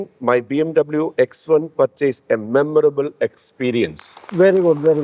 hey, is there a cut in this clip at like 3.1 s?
no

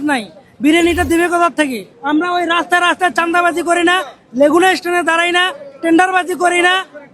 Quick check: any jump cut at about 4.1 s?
no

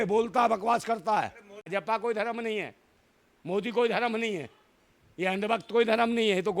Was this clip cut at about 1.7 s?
yes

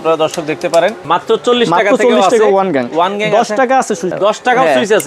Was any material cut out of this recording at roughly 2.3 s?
no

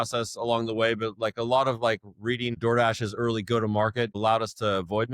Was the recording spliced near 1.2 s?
no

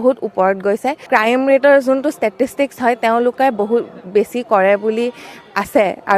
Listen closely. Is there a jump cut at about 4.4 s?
no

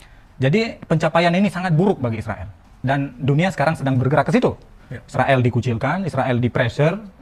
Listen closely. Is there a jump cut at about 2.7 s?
yes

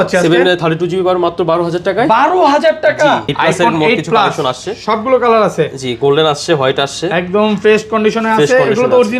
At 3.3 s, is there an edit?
yes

